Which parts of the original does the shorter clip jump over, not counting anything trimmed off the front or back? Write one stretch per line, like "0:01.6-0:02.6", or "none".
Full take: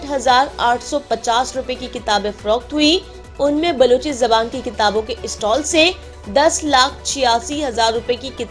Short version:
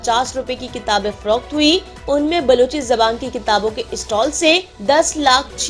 0:03.1-0:03.3
0:06.0-0:06.2